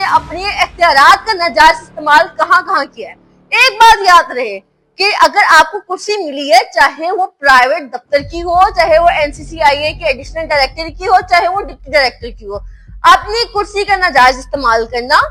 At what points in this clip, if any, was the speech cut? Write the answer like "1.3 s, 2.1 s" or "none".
none